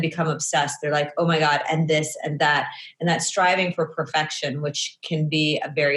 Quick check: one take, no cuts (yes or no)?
yes